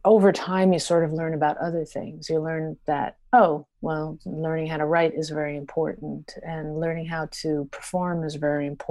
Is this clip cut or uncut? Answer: uncut